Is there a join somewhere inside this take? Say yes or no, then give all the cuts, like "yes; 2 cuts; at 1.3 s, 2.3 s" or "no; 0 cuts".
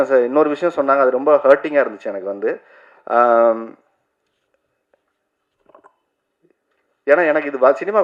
no; 0 cuts